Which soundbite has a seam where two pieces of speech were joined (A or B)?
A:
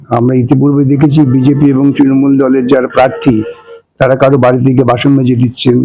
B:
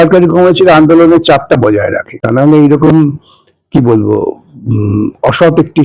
B